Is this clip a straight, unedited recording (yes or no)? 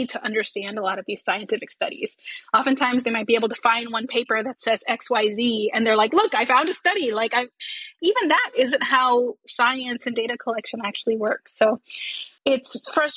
yes